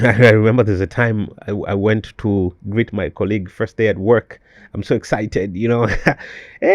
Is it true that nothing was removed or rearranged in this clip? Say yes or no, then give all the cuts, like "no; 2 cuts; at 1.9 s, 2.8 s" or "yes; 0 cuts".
yes; 0 cuts